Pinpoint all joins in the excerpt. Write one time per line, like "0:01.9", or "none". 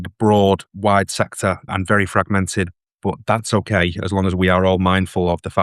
0:01.7